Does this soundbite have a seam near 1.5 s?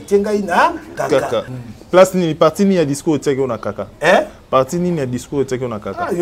yes; 1 cut; at 1.5 s

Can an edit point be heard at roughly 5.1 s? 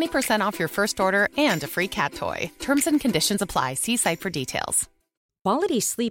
yes; 1 cut; at 5.1 s

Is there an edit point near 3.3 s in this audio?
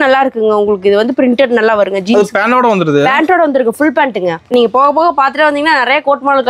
no; 1 cut; at 4.5 s

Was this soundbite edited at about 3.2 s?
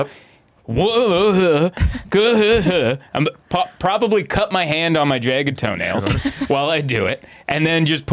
no; 0 cuts

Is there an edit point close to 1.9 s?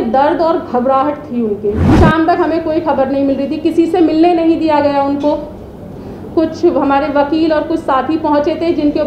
yes; 1 cut; at 1.9 s

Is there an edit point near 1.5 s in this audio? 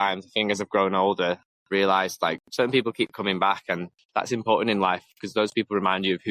yes; 3 cuts; at 1.5 s, 2.4 s, 3.9 s

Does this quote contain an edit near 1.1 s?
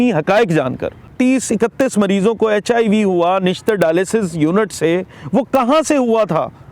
yes; 1 cut; at 1.1 s

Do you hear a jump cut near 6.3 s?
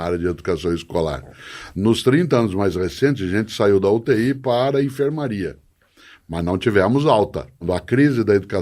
no; 1 cut; at 7.6 s

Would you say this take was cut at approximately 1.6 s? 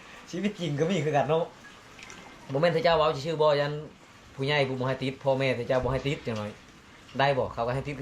yes; 1 cut; at 1.6 s

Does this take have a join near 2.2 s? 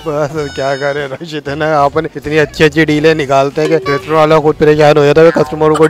yes; 2 cuts; at 2.2 s, 3.9 s

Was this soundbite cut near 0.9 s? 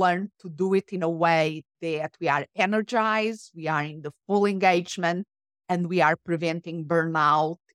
no; 0 cuts

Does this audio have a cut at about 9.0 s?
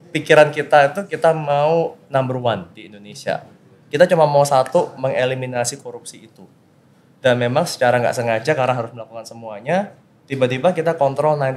no; 0 cuts

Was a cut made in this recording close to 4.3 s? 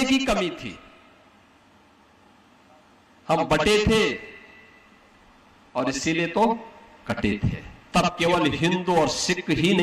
no; 1 cut; at 7.7 s

